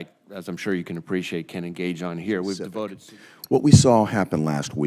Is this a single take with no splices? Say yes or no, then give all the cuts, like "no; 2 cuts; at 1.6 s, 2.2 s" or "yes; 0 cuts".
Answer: no; 1 cut; at 3.0 s